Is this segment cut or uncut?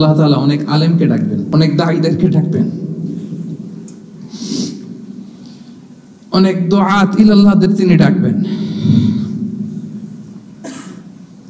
cut